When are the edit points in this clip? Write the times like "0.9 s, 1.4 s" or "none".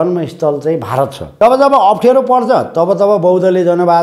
1.4 s